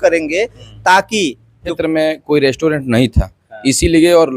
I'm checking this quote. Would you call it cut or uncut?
cut